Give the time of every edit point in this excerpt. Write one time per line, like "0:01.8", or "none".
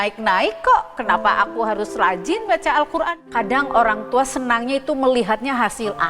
0:03.2